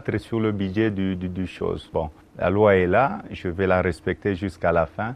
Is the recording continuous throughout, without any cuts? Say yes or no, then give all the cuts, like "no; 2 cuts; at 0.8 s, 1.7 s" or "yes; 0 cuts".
no; 1 cut; at 3.8 s